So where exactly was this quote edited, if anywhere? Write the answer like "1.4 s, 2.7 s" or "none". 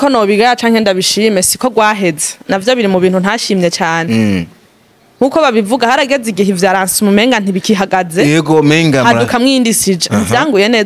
none